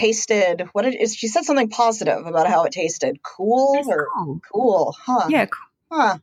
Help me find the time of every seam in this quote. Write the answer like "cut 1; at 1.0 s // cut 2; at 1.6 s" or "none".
none